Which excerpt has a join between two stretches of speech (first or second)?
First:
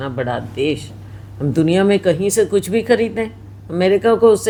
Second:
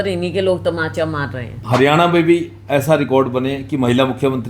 second